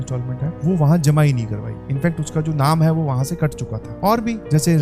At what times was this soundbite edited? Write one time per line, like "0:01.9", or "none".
none